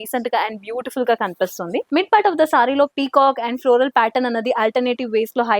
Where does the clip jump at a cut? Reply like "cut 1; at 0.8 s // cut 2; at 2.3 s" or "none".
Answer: cut 1; at 1.9 s